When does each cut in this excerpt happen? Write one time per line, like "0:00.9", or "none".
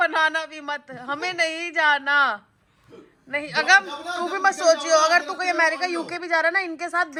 none